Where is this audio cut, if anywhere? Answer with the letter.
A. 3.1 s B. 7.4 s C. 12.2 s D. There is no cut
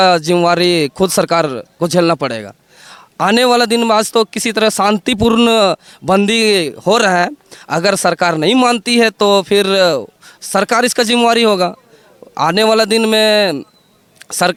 D